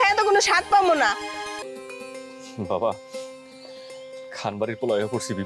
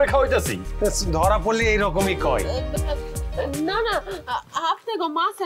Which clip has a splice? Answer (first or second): first